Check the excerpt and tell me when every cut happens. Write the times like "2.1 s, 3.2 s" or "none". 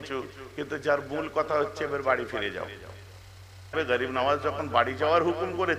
3.7 s